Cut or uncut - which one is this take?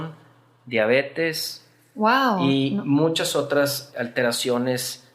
cut